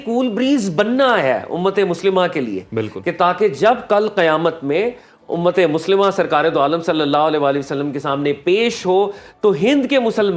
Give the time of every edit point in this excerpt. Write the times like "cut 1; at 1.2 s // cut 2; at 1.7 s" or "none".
none